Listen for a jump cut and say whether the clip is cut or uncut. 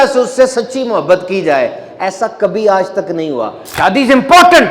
cut